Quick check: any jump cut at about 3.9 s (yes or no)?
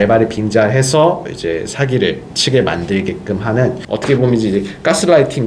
yes